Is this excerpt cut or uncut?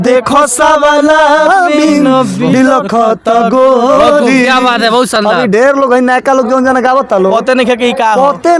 uncut